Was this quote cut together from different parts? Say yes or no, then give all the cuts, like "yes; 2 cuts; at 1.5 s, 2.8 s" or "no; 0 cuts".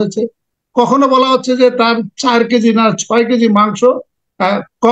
no; 0 cuts